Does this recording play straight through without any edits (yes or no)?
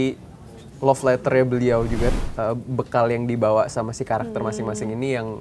no